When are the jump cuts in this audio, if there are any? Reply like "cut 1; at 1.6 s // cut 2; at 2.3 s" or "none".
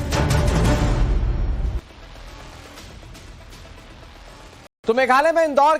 none

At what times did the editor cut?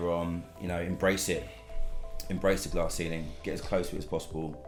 none

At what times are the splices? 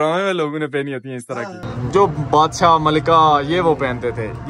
cut 1; at 1.7 s

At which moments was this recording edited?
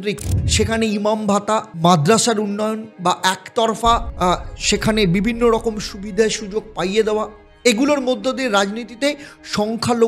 cut 1; at 2.9 s // cut 2; at 4.1 s

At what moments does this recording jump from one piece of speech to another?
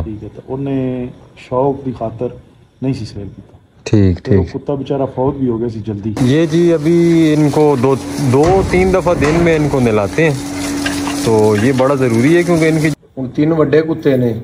cut 1; at 6.1 s // cut 2; at 12.9 s

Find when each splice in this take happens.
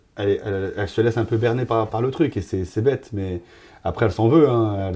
none

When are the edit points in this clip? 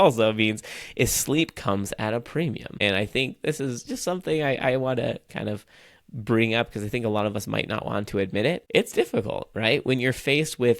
cut 1; at 2.7 s // cut 2; at 8.6 s

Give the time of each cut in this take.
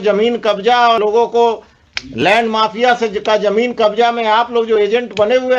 cut 1; at 1.0 s

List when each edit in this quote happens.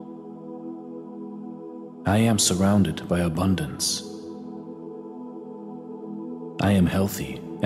cut 1; at 4.1 s // cut 2; at 6.6 s

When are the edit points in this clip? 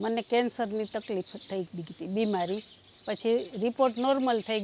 none

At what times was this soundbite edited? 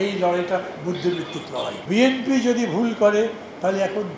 cut 1; at 1.8 s

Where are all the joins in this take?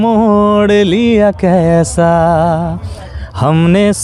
none

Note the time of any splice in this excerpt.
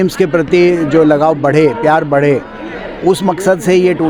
none

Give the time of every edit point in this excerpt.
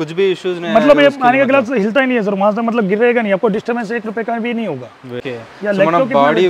cut 1; at 5.2 s

